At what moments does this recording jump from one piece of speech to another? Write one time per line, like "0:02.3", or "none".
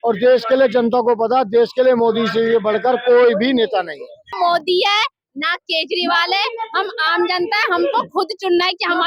0:04.2